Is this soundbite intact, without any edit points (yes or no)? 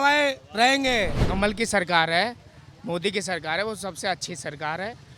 no